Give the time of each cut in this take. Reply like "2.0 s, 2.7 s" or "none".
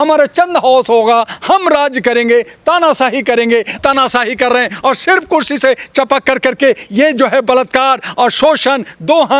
3.7 s